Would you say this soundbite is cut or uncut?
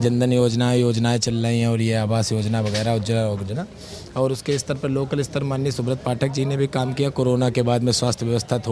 uncut